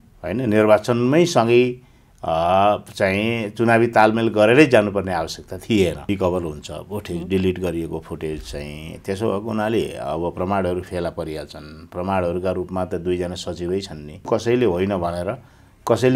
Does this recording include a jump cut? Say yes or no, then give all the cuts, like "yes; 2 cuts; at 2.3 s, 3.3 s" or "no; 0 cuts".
yes; 2 cuts; at 6.1 s, 14.3 s